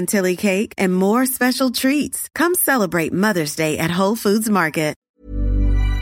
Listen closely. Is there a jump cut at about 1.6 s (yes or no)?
no